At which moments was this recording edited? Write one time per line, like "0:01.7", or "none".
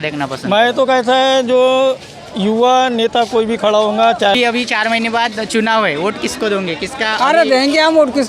0:04.4